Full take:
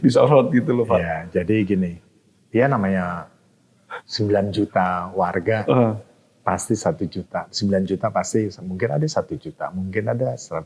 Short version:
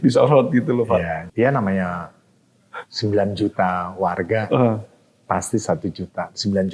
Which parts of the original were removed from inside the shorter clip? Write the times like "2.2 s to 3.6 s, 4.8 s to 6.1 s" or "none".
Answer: 1.2 s to 2.4 s